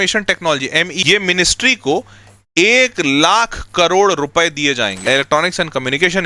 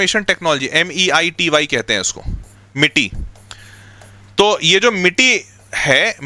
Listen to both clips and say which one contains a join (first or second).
first